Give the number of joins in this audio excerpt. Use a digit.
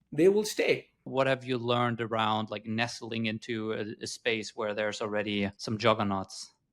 2